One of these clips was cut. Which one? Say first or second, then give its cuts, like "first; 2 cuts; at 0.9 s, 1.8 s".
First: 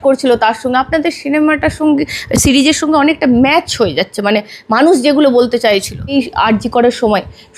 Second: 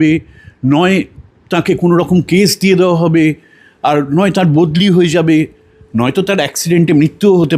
first; 1 cut; at 6.1 s